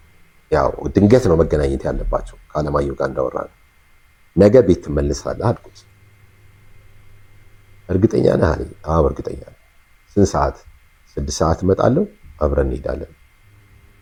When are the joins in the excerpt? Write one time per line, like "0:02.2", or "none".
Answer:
none